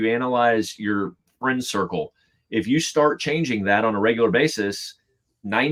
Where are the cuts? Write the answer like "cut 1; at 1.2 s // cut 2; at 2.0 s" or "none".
none

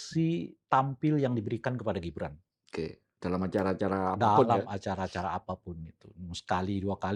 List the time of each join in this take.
none

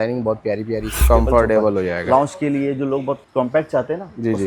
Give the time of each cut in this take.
cut 1; at 1.0 s // cut 2; at 3.2 s

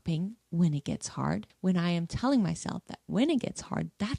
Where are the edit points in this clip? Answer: cut 1; at 1.5 s

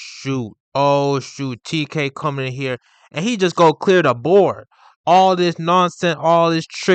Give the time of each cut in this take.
none

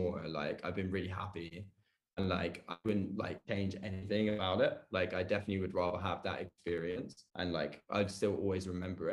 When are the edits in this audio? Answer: none

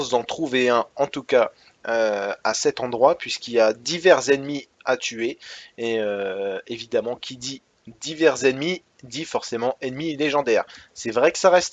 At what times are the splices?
cut 1; at 2.6 s

